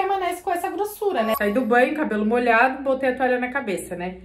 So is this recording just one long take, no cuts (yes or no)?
no